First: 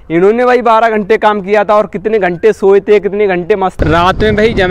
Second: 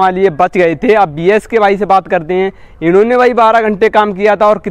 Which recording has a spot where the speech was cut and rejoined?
first; 1 cut; at 3.8 s

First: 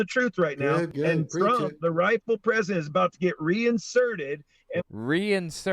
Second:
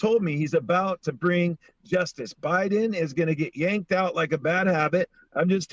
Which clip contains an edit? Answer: first; 1 cut; at 0.9 s

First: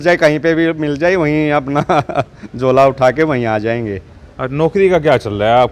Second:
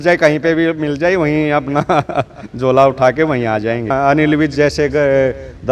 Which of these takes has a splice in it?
second; 1 cut; at 3.9 s

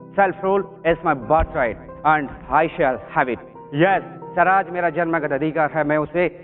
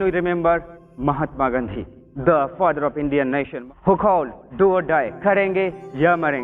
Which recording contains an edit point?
second; 1 cut; at 3.5 s

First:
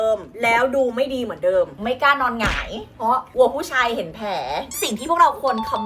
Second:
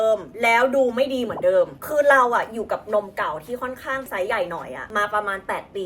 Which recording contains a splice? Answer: first; 2 cuts; at 1.8 s, 4.7 s

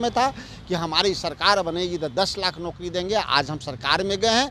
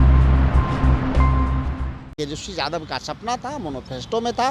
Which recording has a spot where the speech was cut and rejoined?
second; 1 cut; at 2.1 s

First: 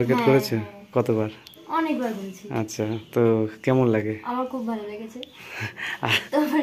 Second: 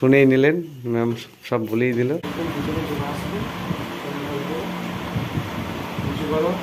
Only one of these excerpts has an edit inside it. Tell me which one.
second; 1 cut; at 2.3 s

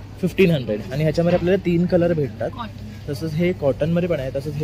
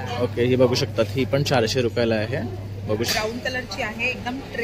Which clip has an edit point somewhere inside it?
second; 1 cut; at 3.1 s

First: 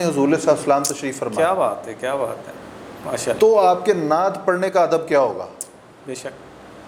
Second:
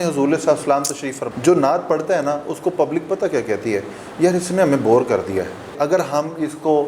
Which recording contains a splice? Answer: second; 2 cuts; at 1.2 s, 5.7 s

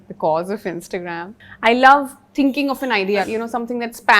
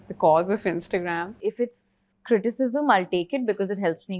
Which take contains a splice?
second; 1 cut; at 1.4 s

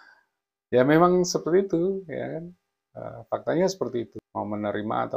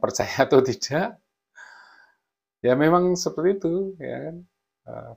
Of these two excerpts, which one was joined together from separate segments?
first; 1 cut; at 4.2 s

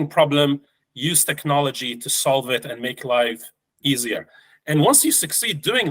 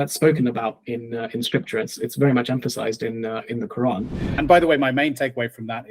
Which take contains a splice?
second; 1 cut; at 4.3 s

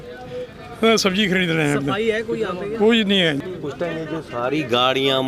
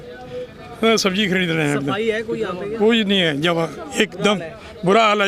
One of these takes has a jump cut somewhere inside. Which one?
first; 1 cut; at 3.4 s

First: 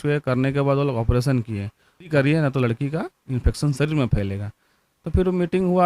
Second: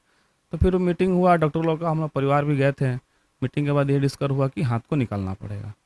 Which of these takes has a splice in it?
first; 1 cut; at 2.1 s

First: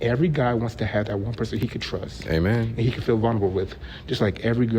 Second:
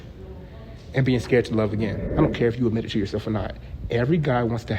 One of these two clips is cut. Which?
second; 1 cut; at 2.0 s

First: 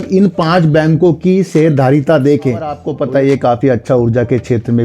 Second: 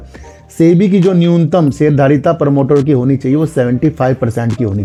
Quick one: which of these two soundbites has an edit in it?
first; 1 cut; at 2.9 s

